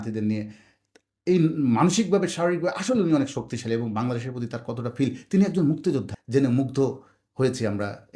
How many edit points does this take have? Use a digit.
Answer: 1